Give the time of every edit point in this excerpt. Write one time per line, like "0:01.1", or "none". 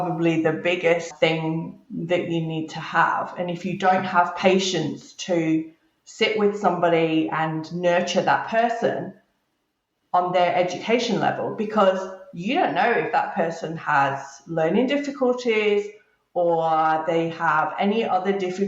0:01.1